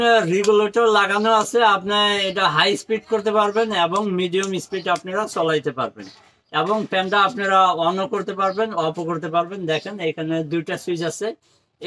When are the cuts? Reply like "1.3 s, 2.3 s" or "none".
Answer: none